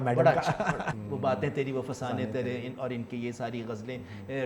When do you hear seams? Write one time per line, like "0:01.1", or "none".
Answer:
0:01.0